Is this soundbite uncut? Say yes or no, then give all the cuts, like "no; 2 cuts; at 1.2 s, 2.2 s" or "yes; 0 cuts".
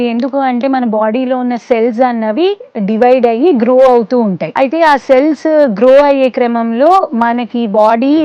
no; 1 cut; at 4.5 s